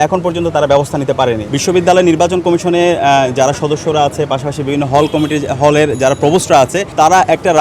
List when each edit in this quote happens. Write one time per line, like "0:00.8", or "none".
0:01.4